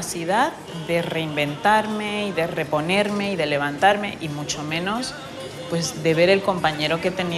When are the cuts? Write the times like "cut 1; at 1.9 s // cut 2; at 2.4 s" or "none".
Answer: none